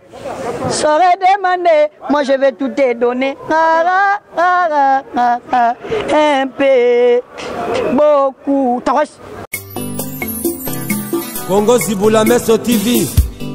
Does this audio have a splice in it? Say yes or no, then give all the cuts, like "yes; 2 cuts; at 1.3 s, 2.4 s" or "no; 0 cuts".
yes; 1 cut; at 9.4 s